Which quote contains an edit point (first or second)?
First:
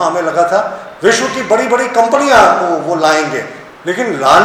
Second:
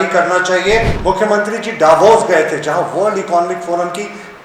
second